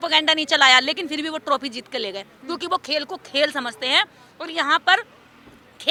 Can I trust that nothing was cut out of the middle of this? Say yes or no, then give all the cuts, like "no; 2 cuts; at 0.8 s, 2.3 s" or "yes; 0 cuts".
yes; 0 cuts